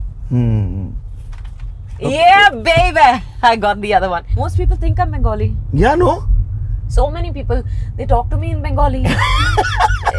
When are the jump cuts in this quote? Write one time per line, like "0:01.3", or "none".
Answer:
0:04.4